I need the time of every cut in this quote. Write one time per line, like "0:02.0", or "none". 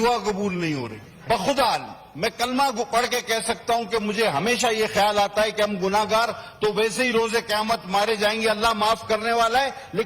0:01.2